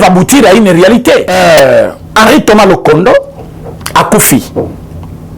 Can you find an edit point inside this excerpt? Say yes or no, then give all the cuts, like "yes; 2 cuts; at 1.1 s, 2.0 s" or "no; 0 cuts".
yes; 1 cut; at 1.3 s